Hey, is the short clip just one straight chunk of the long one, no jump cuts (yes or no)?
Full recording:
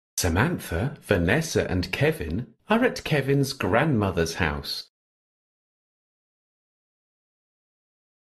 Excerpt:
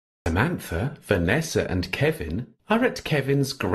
yes